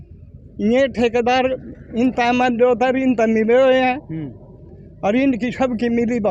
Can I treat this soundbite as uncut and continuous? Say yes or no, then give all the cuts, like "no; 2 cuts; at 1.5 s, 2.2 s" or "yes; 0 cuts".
yes; 0 cuts